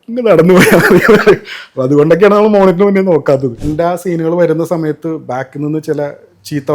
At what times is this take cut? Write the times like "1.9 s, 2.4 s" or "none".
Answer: 3.6 s

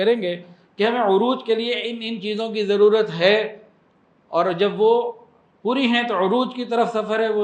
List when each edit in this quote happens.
none

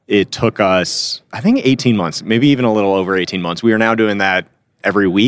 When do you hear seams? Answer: none

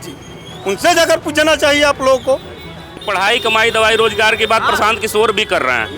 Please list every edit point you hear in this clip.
3.0 s

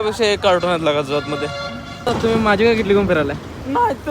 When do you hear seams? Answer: none

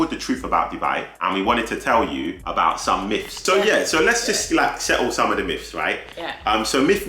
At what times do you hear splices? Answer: 1.1 s, 2.4 s, 3.5 s

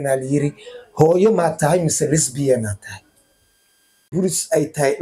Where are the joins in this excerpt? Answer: 4.1 s

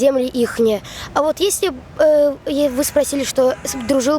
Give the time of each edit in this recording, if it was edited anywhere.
none

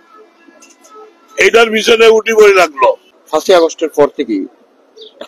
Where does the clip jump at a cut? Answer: 3.1 s

